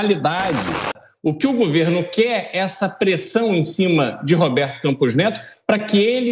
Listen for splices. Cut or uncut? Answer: cut